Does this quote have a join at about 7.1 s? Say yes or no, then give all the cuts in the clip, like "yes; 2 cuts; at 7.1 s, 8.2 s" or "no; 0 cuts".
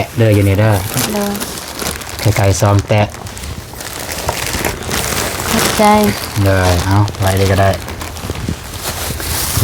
no; 0 cuts